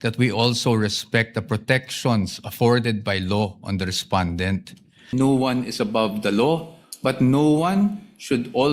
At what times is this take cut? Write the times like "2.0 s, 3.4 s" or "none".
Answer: 5.1 s